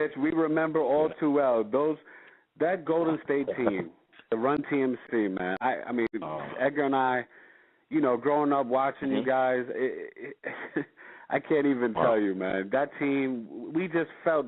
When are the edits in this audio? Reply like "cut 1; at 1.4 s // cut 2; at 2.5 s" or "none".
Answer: cut 1; at 5.0 s